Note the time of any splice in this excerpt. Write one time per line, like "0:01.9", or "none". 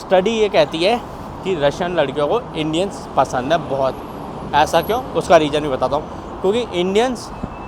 none

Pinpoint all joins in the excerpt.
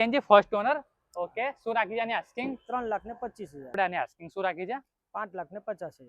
0:03.7

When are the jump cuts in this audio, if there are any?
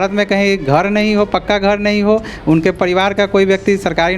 none

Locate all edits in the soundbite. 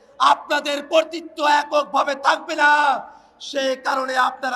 none

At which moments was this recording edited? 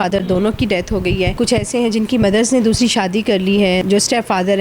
0:01.3
0:03.8

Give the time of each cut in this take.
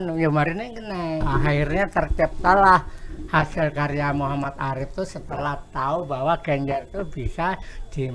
0:01.3

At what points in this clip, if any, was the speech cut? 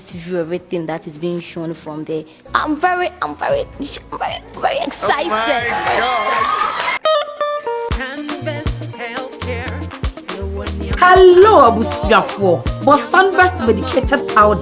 0:07.0

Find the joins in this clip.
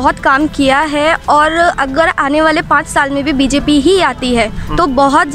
none

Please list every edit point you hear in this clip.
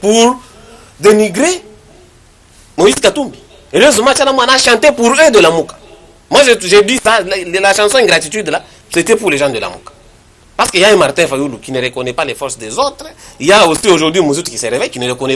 none

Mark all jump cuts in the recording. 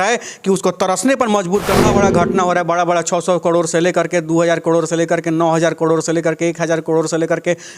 0:01.8

